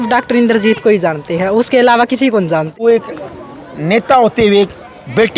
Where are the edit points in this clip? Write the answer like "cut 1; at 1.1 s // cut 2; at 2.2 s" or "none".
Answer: cut 1; at 2.7 s